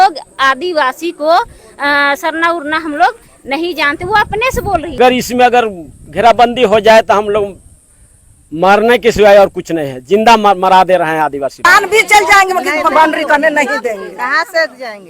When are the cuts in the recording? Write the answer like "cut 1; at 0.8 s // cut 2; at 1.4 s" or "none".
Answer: cut 1; at 5.0 s // cut 2; at 11.7 s